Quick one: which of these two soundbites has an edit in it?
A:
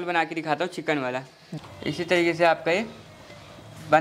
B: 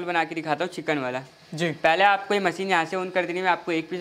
A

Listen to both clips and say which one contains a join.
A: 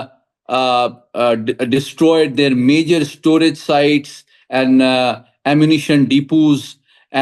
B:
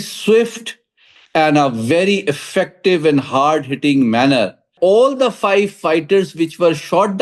B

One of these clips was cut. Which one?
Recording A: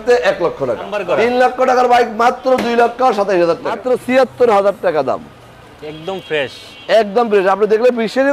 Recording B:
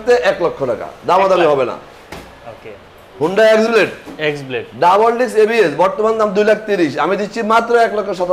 A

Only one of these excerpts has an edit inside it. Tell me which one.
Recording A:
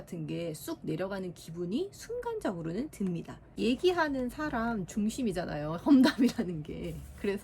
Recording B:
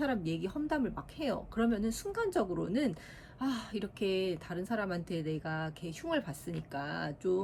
A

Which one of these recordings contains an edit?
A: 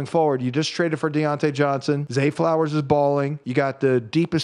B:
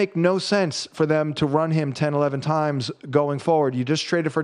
A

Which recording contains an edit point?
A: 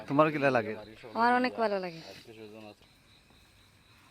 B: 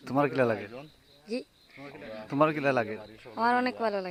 A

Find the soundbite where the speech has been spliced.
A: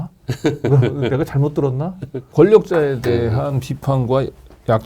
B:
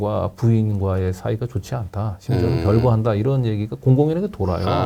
A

